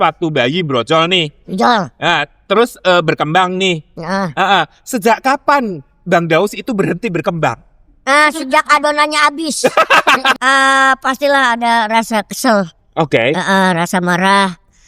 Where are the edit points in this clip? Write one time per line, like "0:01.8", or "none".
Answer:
0:10.4